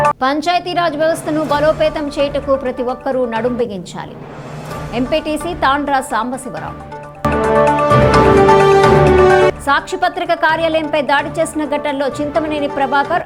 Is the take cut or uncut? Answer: uncut